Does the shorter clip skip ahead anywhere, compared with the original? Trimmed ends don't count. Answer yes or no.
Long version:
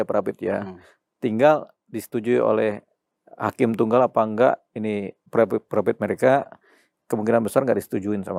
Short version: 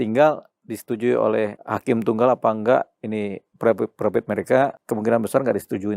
yes